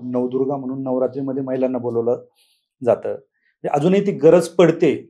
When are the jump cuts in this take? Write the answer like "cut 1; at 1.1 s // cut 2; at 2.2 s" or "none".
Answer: none